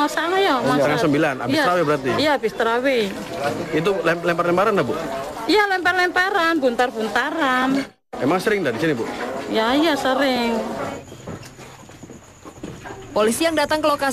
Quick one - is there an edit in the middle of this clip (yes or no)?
yes